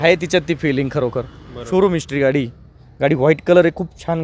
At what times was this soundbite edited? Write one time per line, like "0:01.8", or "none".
0:01.6